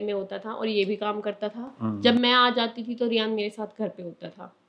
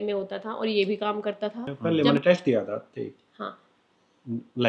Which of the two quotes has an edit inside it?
second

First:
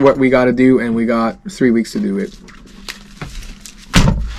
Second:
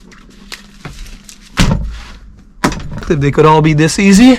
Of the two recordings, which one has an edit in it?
second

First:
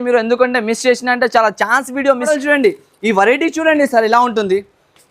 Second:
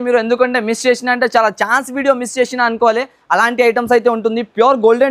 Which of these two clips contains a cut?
first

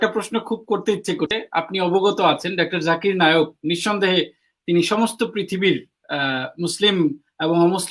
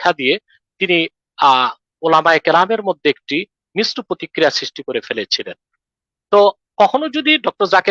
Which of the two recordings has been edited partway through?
first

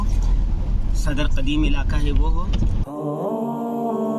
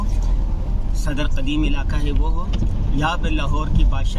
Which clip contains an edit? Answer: first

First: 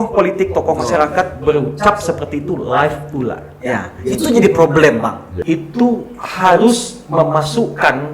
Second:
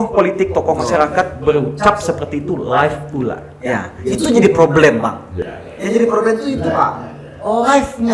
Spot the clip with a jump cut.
first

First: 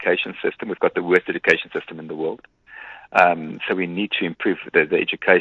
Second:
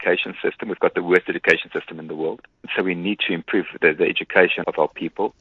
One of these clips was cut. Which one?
second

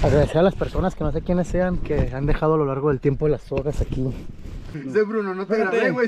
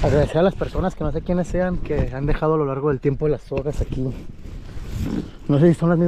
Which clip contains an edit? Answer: first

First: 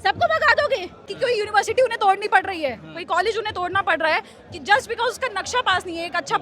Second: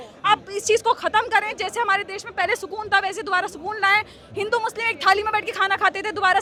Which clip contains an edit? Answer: first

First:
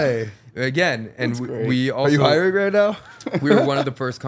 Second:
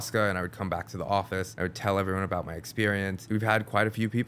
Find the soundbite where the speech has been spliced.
second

